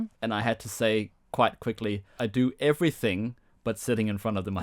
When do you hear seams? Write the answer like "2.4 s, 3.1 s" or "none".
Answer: 2.2 s